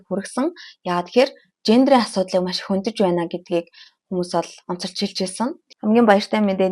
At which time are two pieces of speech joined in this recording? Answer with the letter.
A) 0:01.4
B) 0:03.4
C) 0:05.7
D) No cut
C